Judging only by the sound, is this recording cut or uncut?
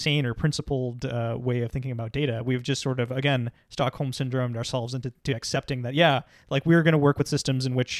uncut